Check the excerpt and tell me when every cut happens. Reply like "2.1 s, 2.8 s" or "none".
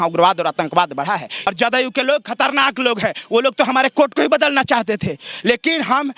1.4 s

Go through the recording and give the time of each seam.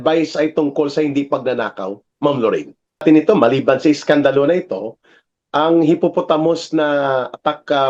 3.0 s

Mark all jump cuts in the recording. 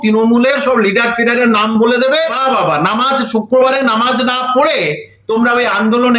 2.4 s

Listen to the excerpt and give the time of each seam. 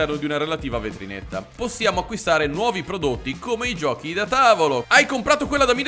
1.4 s, 4.9 s

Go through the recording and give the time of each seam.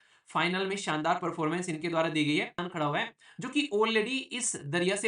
2.6 s

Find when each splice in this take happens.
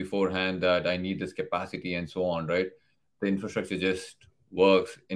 3.1 s

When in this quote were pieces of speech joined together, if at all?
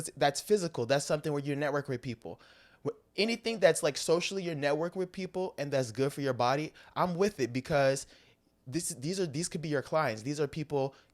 none

